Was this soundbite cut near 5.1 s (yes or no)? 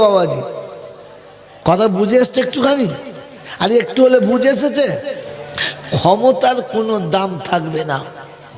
yes